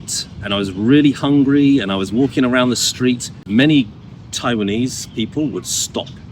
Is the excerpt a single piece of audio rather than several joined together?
no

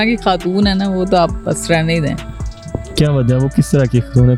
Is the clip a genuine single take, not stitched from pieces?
yes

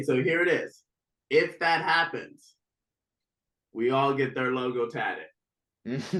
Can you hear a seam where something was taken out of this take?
no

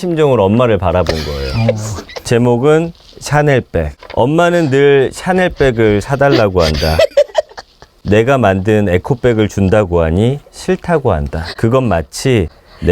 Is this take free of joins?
no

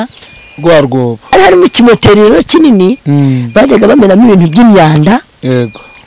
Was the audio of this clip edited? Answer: yes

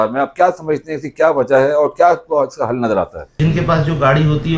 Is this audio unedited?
no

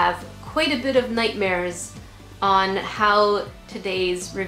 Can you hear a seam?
no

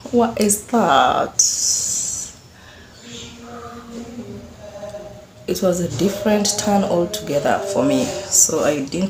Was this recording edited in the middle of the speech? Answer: no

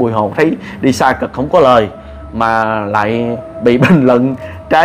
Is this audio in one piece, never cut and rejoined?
yes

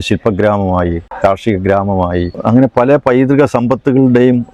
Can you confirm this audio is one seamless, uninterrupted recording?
yes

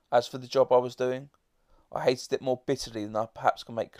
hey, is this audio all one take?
yes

